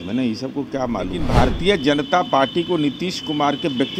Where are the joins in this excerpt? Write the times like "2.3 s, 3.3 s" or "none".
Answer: 1.2 s

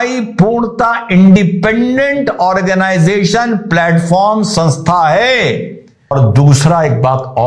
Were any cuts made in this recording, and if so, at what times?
6.1 s

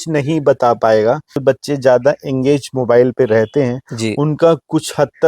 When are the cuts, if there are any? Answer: 1.4 s

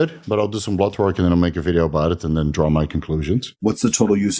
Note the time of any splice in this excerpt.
3.5 s

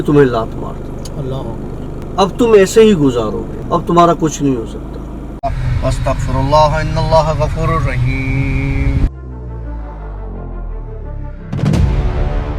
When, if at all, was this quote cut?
2.0 s, 3.5 s, 5.4 s

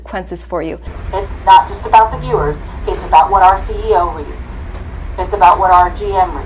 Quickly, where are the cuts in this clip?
1.0 s

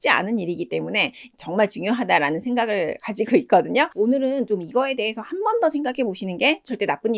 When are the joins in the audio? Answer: 3.9 s

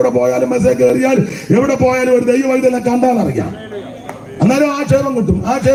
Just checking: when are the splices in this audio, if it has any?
none

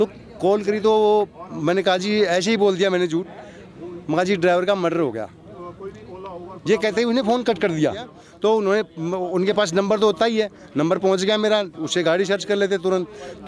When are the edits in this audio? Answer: 8.2 s

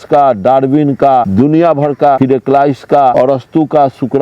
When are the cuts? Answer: 1.3 s, 2.2 s, 3.1 s

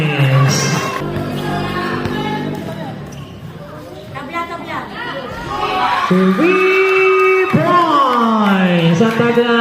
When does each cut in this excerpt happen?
1.1 s

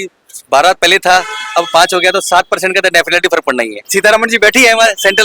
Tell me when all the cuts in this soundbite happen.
3.8 s

